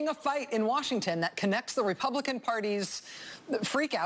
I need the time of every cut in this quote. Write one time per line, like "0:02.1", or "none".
0:01.3